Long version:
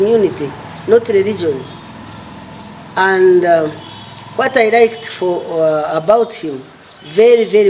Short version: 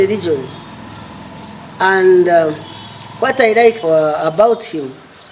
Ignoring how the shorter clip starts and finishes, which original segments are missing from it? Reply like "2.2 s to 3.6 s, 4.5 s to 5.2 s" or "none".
5.0 s to 5.5 s